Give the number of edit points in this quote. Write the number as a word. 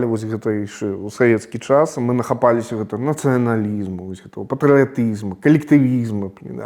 one